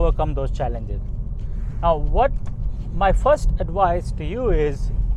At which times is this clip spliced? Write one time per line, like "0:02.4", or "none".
none